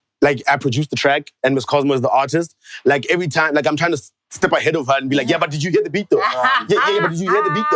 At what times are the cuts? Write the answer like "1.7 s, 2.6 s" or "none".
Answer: none